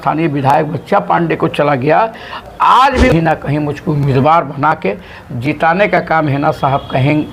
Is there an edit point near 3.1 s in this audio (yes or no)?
yes